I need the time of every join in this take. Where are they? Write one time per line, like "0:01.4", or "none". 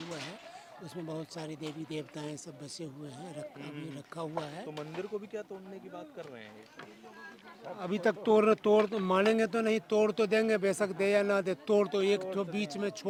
none